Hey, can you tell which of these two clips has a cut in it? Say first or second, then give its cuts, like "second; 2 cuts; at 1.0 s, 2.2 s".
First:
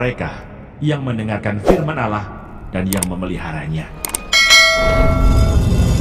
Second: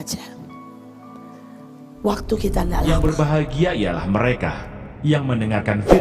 second; 1 cut; at 2.8 s